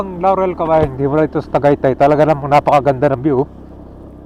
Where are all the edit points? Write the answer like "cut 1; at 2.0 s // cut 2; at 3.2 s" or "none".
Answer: none